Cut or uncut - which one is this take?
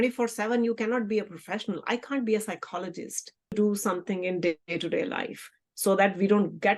cut